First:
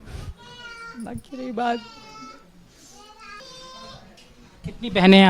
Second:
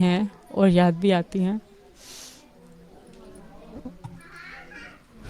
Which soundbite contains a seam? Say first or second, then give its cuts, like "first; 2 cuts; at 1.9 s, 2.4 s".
first; 1 cut; at 3.4 s